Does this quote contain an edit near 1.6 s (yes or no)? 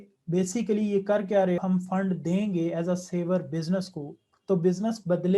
yes